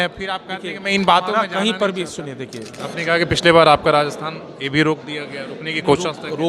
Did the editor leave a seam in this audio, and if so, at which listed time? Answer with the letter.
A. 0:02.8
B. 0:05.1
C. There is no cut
A